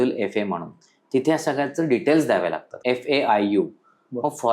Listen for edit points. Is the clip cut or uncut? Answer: cut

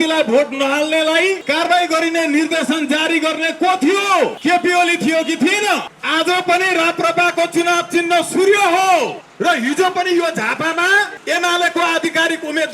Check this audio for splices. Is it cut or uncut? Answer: cut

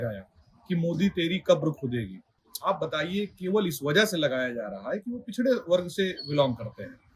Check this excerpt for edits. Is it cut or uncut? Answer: uncut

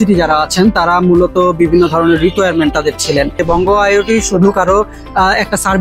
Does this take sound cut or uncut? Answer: cut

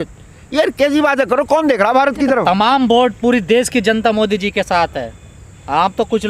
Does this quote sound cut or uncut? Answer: uncut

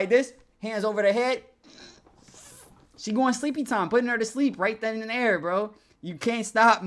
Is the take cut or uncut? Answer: uncut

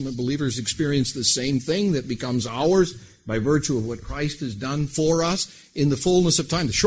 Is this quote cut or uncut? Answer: uncut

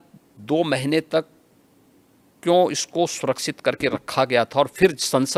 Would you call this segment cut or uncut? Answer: uncut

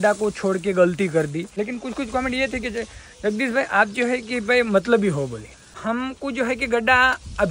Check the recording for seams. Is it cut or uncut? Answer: cut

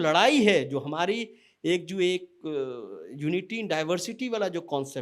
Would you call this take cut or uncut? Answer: uncut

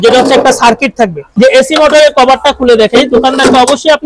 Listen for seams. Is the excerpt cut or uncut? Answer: cut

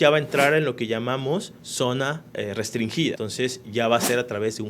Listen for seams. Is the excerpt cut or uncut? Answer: cut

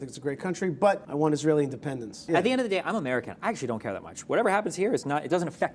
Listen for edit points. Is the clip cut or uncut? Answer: cut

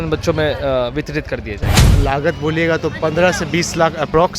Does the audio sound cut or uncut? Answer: cut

